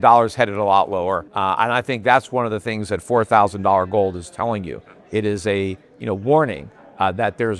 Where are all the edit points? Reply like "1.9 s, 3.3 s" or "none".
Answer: none